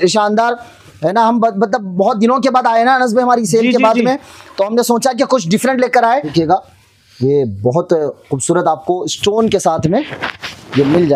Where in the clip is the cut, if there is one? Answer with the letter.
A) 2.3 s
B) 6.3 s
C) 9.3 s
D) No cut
B